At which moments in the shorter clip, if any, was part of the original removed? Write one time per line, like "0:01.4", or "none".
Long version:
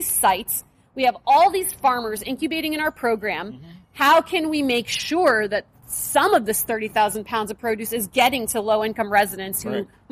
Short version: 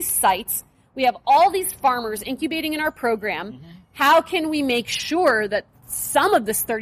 none